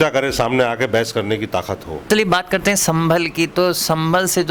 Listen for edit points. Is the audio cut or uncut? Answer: cut